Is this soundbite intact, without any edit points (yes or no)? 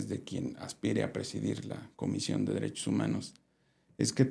yes